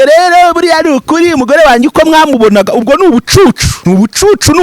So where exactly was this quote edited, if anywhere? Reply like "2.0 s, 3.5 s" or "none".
3.7 s